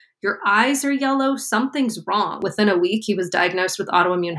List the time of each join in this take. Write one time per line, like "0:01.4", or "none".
0:02.4